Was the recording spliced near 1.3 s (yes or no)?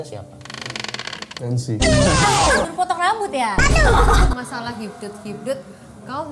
yes